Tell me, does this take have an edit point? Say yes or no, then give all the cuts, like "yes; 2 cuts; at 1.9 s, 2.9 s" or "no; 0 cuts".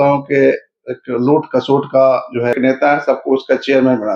yes; 1 cut; at 2.5 s